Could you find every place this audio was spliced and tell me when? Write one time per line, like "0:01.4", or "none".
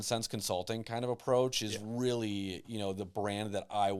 none